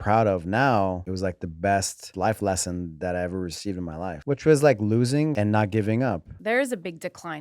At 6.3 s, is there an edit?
yes; 5 cuts; at 1.1 s, 2.1 s, 4.2 s, 5.3 s, 6.3 s

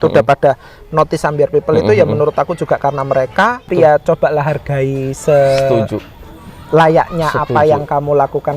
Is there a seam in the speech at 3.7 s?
yes; 1 cut; at 3.7 s

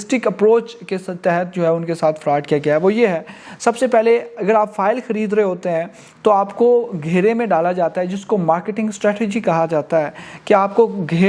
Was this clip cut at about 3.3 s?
no; 0 cuts

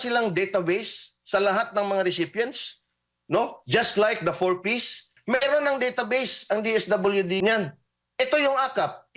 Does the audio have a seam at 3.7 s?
no; 2 cuts; at 5.1 s, 7.4 s

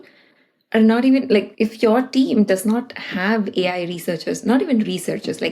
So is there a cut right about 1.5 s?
yes; 1 cut; at 1.5 s

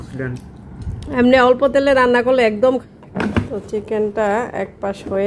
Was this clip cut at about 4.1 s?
no; 1 cut; at 2.8 s

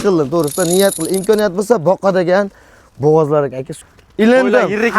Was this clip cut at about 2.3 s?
no; 1 cut; at 3.7 s

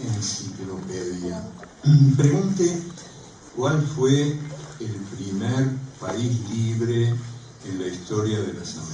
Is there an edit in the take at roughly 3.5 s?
yes; 1 cut; at 3.5 s

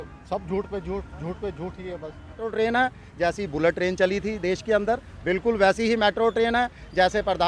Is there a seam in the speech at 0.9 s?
no; 1 cut; at 2.4 s

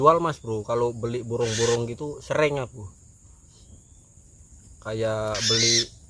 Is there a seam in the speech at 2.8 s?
no; 1 cut; at 4.6 s

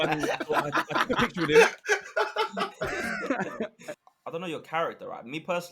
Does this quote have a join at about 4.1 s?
yes; 1 cut; at 4.1 s

